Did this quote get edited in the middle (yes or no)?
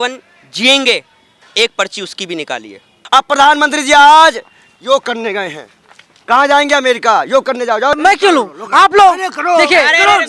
yes